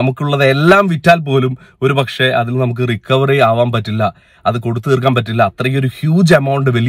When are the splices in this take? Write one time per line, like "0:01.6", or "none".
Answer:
none